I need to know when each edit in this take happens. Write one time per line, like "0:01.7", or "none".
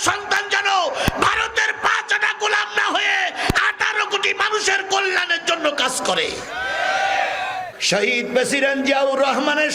0:07.7